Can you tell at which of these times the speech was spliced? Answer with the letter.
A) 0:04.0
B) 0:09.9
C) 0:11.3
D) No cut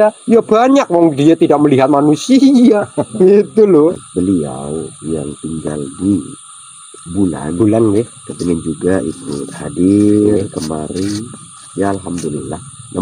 A